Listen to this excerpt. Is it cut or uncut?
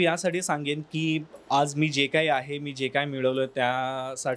uncut